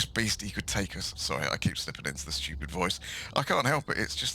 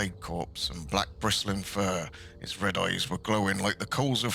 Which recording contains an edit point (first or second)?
first